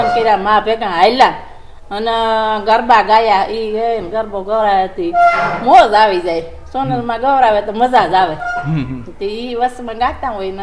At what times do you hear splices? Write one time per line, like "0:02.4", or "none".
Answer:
none

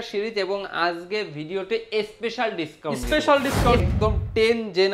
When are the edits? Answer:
0:03.8

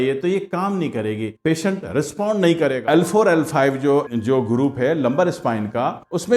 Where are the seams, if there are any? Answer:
0:02.8

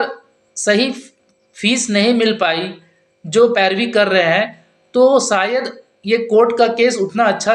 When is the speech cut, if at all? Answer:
none

